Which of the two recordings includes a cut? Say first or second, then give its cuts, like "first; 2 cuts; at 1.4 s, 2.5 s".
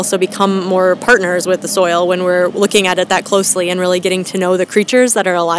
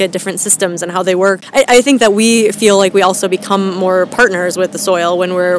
second; 1 cut; at 1.4 s